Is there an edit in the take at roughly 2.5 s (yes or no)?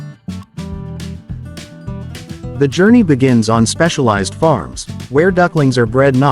yes